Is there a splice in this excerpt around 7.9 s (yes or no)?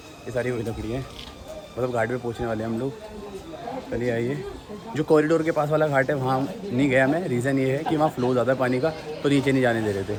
no